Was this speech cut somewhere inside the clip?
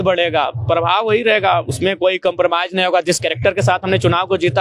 no; 0 cuts

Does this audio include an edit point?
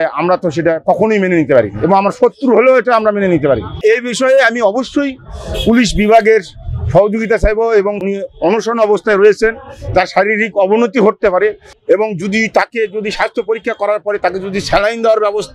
yes; 3 cuts; at 3.8 s, 8.0 s, 11.7 s

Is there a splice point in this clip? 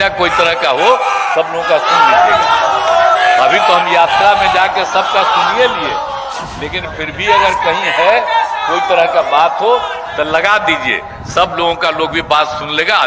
no; 0 cuts

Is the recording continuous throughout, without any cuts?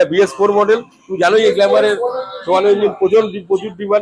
yes; 0 cuts

